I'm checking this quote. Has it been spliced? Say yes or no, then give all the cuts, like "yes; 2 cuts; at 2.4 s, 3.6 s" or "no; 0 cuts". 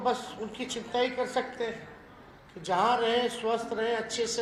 no; 0 cuts